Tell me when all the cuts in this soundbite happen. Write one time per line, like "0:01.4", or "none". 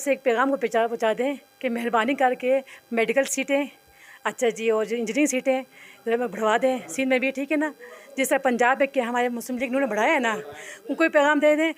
none